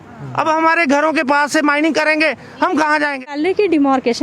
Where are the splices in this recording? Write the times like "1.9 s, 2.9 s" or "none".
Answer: 3.2 s

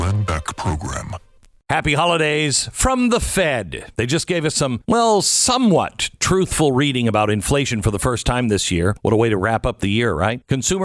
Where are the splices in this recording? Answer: 1.6 s

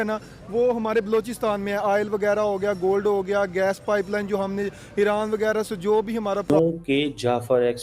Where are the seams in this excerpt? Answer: 6.5 s

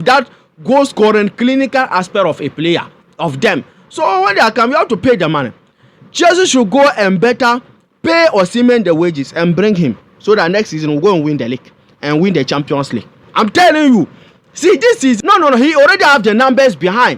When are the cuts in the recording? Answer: 15.2 s

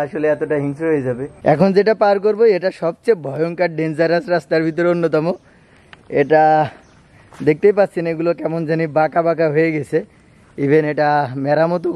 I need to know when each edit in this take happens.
1.4 s

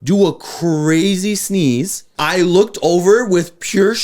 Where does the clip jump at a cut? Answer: 2.0 s

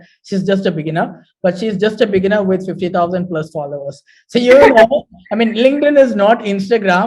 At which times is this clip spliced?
none

